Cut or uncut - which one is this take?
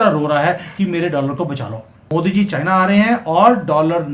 cut